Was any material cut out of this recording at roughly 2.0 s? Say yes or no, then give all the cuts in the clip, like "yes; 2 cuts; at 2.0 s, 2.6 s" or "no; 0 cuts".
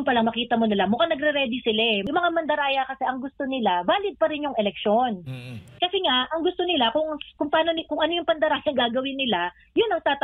yes; 1 cut; at 2.0 s